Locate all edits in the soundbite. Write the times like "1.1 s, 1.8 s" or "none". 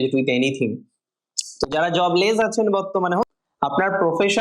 3.3 s